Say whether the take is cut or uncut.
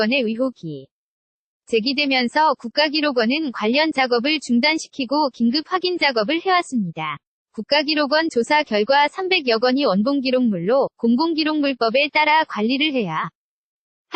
uncut